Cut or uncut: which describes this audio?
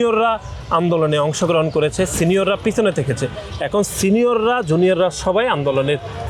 uncut